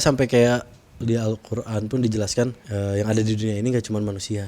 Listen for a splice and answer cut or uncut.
cut